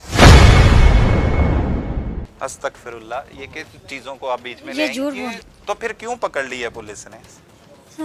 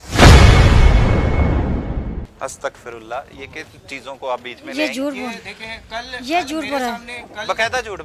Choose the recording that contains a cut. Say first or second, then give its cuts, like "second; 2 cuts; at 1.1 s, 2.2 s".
first; 1 cut; at 5.5 s